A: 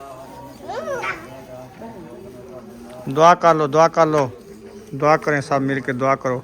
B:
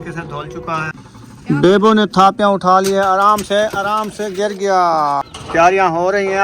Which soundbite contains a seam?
B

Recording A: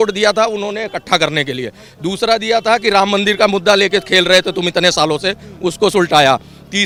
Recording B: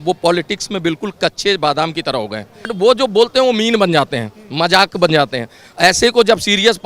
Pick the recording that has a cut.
B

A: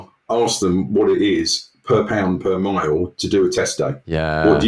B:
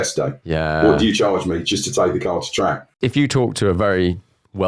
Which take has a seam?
B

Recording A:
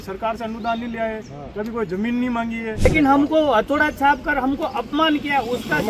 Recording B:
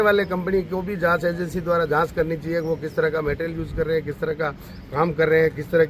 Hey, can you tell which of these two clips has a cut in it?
A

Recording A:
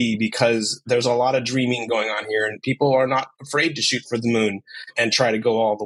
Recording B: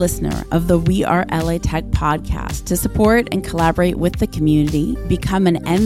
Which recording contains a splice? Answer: A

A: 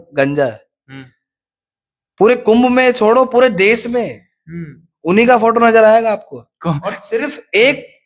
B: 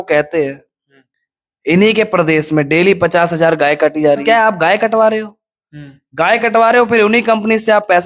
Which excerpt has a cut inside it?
B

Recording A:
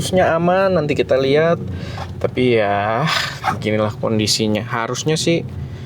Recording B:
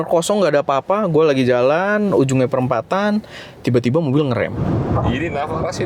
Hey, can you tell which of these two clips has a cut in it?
B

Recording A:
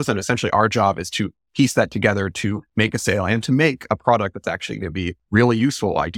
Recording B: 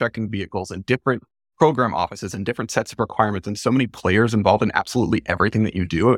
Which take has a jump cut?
A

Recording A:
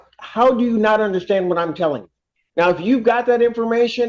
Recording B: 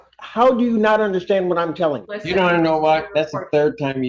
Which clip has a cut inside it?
B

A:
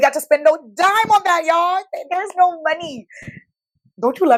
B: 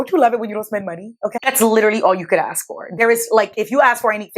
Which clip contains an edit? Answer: B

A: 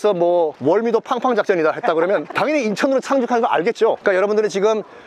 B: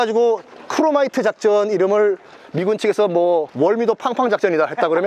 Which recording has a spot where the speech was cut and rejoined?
A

